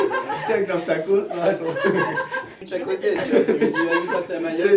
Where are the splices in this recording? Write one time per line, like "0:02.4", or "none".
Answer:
0:02.6